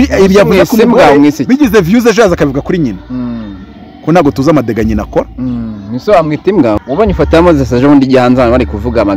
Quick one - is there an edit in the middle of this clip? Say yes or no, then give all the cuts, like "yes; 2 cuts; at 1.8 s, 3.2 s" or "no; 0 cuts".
yes; 1 cut; at 6.8 s